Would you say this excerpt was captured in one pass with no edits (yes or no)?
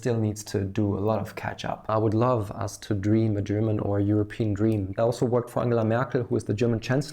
no